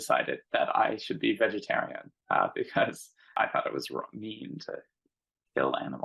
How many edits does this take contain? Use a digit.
1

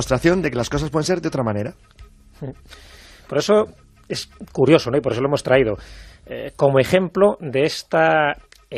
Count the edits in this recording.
1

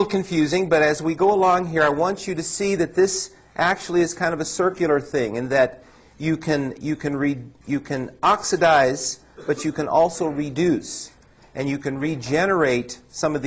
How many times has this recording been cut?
1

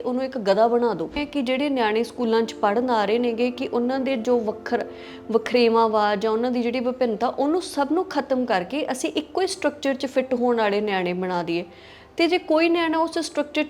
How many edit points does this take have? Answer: 1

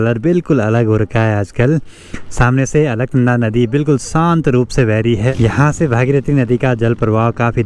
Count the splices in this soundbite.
0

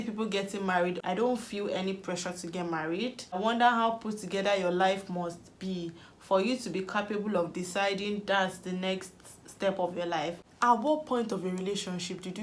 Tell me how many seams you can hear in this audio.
3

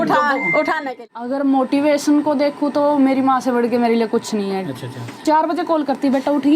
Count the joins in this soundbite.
2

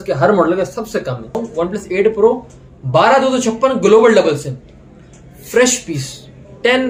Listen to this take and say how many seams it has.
1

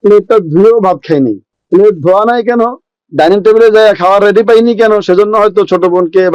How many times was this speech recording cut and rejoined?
1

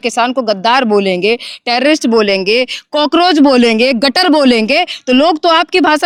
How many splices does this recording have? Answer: 0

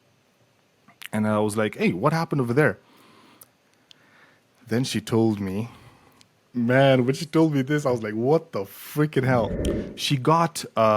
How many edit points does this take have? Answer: 1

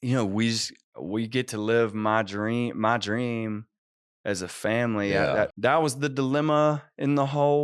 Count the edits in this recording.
1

